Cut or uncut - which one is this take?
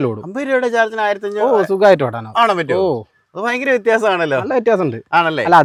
uncut